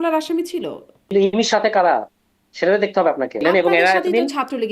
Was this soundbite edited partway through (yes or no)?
yes